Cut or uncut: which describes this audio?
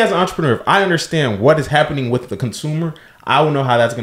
uncut